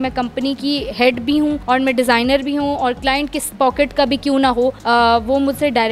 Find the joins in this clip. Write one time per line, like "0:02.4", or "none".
none

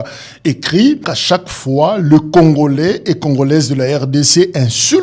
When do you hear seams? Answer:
0:01.1

